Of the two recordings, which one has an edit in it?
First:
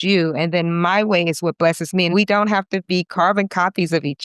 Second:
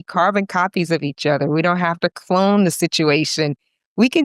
first; 1 cut; at 2.1 s

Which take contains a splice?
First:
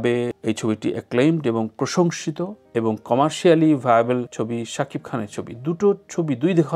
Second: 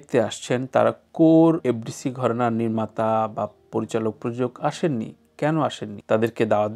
second; 2 cuts; at 1.6 s, 5.9 s

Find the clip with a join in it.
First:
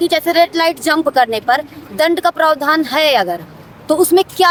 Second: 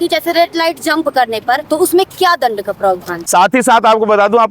second; 2 cuts; at 1.6 s, 3.3 s

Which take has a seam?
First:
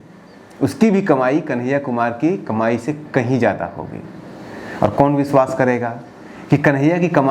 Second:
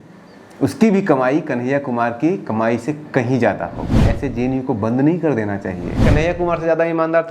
second; 2 cuts; at 4.1 s, 6.0 s

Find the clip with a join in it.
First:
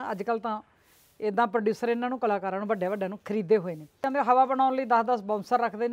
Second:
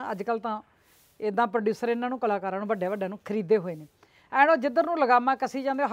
first; 1 cut; at 4.0 s

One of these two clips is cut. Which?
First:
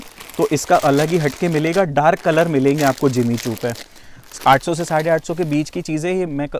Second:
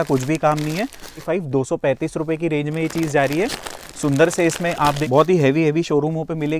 second; 2 cuts; at 1.2 s, 5.0 s

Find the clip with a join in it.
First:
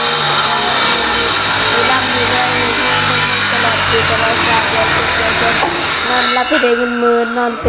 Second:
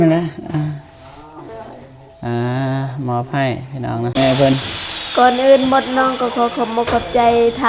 second; 1 cut; at 4.1 s

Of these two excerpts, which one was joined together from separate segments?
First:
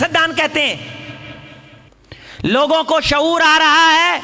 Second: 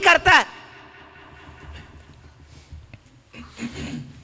first; 1 cut; at 1.9 s

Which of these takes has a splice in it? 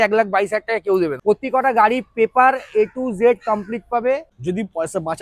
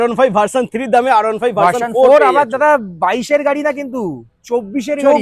first; 2 cuts; at 1.2 s, 4.3 s

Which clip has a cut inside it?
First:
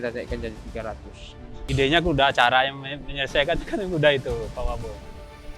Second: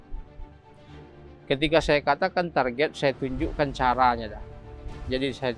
first; 1 cut; at 1.6 s

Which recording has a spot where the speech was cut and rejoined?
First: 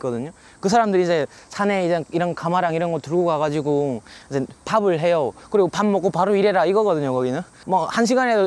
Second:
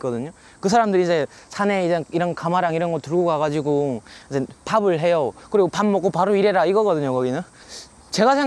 first; 1 cut; at 7.6 s

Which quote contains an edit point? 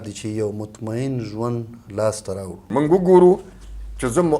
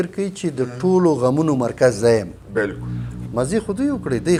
first; 1 cut; at 2.6 s

